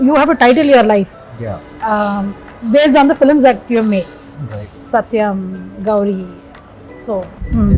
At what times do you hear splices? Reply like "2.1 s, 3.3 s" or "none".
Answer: none